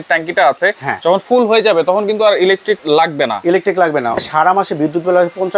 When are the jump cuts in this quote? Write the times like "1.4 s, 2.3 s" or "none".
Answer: 2.8 s, 4.2 s